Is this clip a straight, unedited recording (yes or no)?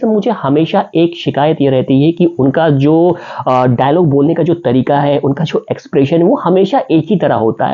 yes